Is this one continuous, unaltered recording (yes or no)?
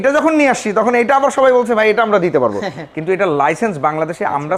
yes